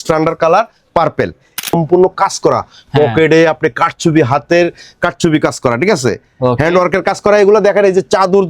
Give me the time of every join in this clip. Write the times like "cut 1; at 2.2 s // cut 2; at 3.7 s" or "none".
cut 1; at 1.6 s